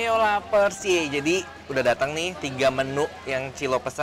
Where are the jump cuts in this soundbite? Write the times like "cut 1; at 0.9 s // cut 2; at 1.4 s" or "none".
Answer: none